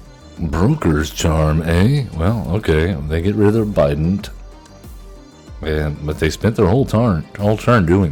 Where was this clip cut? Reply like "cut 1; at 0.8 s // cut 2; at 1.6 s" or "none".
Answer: none

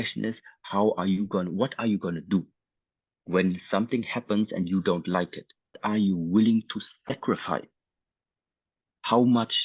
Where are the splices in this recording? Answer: cut 1; at 5.8 s

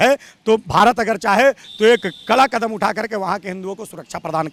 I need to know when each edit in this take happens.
none

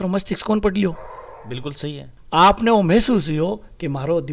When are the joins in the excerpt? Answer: none

